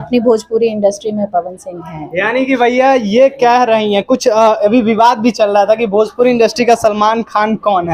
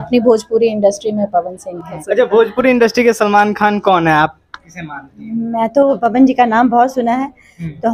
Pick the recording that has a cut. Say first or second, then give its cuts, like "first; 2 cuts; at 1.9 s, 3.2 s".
second; 2 cuts; at 2.0 s, 6.0 s